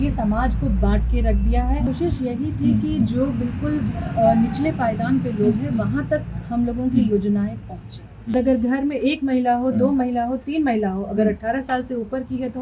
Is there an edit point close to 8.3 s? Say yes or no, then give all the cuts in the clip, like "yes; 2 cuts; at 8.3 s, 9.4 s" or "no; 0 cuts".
yes; 2 cuts; at 1.9 s, 8.3 s